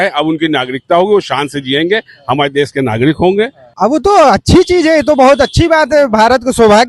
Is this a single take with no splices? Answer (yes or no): no